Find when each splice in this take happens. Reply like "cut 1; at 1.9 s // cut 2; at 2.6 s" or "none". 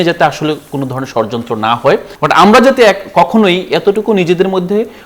cut 1; at 2.1 s